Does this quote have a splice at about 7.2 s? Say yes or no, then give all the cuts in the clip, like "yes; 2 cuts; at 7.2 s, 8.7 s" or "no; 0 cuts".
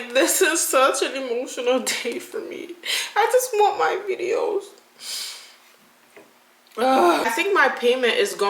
yes; 1 cut; at 7.2 s